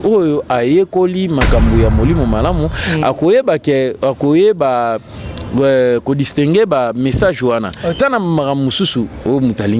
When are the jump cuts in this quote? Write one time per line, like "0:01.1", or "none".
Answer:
0:08.0